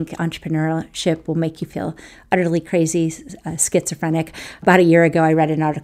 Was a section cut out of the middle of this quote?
yes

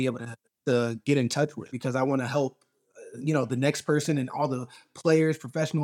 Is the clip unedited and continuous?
no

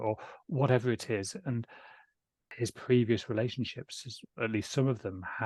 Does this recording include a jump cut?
yes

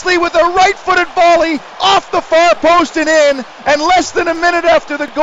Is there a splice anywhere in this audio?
yes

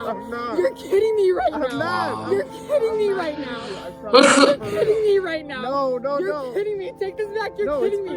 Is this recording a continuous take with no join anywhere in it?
yes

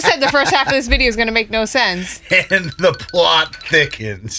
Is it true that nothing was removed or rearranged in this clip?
yes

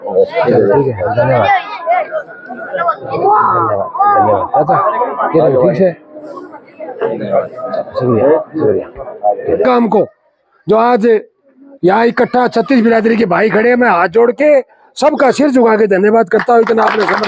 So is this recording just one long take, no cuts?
no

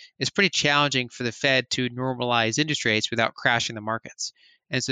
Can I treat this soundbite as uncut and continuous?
yes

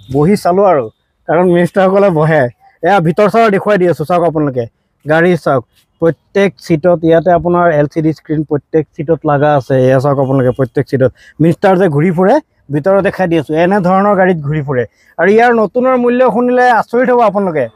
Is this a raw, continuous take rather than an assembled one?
yes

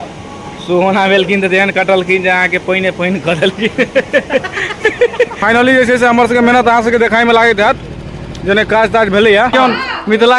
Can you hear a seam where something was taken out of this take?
yes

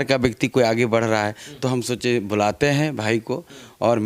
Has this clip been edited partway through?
no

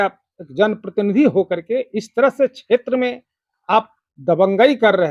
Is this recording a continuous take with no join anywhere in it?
yes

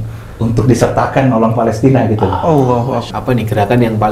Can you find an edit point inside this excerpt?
yes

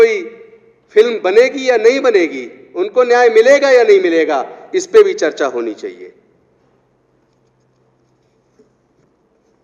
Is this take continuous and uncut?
yes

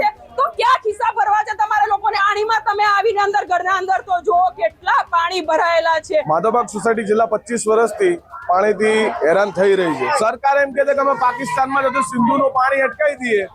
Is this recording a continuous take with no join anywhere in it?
no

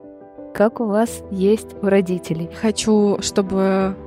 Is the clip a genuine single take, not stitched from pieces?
no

